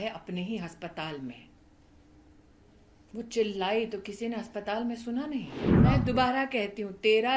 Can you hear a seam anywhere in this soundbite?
yes; 1 cut; at 5.6 s

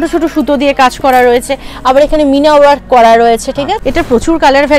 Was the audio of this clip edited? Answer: yes; 1 cut; at 3.8 s

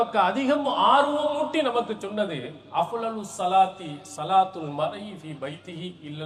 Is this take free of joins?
yes; 0 cuts

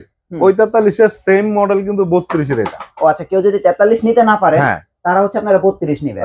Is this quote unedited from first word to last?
yes; 0 cuts

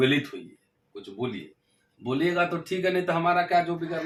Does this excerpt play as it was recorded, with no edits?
yes; 0 cuts

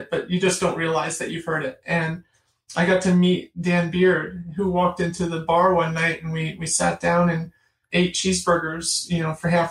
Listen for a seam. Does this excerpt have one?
yes; 1 cut; at 7.8 s

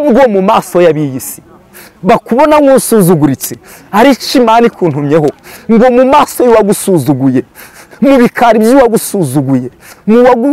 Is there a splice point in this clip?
no; 0 cuts

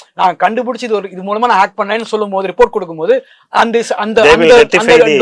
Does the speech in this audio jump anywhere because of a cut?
no; 0 cuts

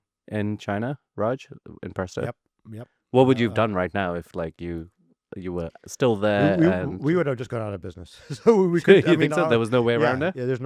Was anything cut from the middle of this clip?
no; 0 cuts

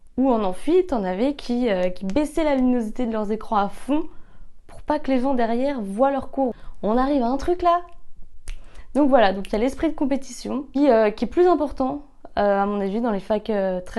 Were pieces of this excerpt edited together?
no; 0 cuts

